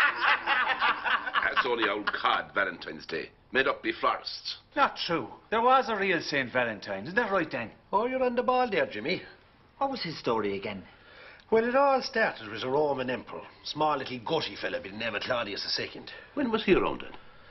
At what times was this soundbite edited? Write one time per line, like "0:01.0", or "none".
0:08.6